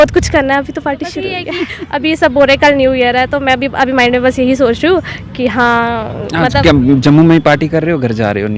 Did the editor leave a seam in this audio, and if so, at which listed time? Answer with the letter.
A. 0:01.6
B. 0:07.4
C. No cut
A